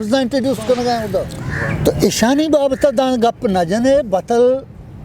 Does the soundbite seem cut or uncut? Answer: cut